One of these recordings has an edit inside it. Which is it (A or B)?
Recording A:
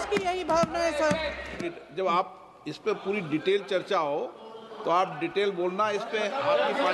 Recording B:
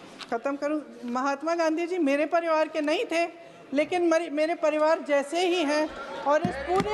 A